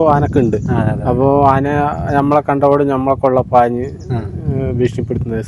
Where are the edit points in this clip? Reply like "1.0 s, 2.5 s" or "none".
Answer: none